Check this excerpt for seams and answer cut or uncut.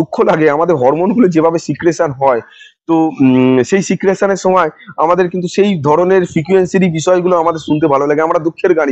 uncut